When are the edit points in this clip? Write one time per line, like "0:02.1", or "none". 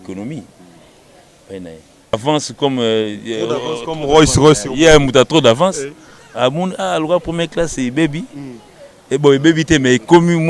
0:02.2